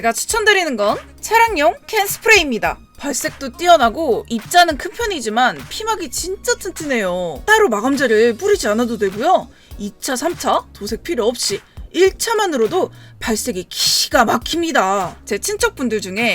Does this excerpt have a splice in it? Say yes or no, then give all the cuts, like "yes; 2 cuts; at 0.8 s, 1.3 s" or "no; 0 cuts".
no; 0 cuts